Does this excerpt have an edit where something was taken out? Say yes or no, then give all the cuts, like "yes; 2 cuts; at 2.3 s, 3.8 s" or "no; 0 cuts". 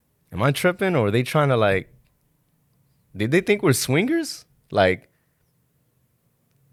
no; 0 cuts